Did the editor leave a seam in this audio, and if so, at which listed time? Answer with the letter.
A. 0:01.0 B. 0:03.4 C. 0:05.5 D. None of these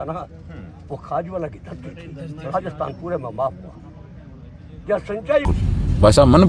C